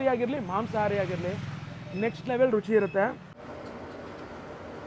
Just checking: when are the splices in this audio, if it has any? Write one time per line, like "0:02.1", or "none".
0:03.4